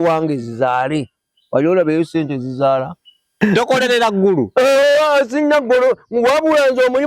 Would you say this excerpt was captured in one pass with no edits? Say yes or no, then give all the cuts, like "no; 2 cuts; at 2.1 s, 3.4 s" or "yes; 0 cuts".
no; 1 cut; at 3.4 s